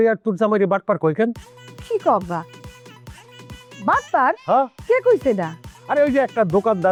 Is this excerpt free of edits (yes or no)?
yes